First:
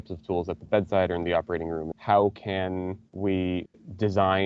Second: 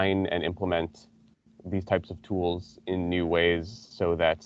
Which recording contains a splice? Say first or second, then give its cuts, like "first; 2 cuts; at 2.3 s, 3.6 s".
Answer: first; 2 cuts; at 1.9 s, 3.0 s